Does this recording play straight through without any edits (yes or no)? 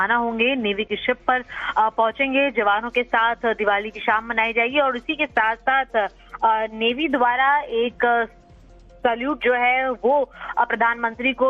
no